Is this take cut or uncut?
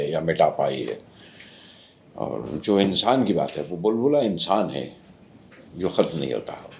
uncut